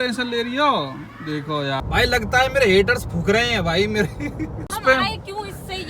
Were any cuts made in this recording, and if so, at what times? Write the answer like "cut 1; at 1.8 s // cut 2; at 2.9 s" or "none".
cut 1; at 1.8 s // cut 2; at 4.8 s